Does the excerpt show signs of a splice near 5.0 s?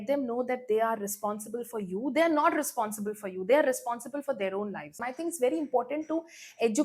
yes; 1 cut; at 5.0 s

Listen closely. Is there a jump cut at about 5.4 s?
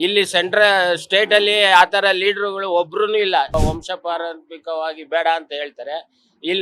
no; 1 cut; at 3.5 s

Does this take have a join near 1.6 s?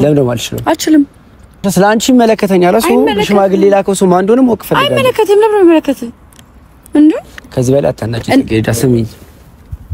yes; 1 cut; at 1.6 s

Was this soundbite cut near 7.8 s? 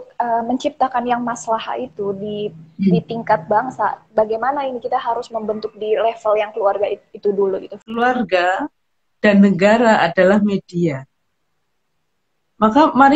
yes; 1 cut; at 7.8 s

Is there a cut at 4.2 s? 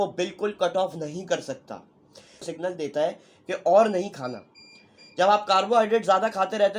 no; 1 cut; at 2.4 s

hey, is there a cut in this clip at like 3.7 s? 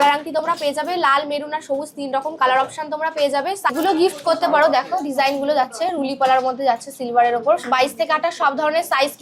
yes; 1 cut; at 3.7 s

